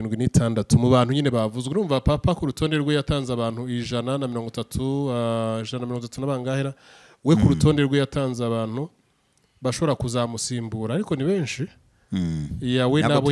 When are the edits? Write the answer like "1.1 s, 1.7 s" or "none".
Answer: none